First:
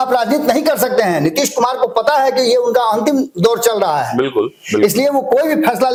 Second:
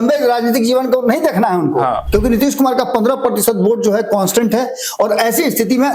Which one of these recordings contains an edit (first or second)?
second